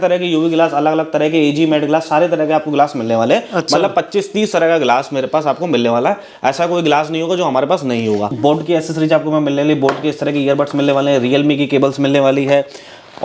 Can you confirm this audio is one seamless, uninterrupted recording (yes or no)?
no